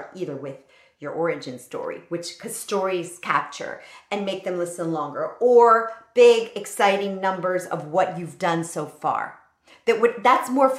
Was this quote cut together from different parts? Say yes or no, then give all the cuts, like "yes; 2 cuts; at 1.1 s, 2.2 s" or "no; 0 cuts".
no; 0 cuts